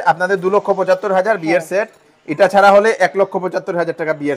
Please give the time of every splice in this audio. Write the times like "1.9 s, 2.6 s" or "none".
none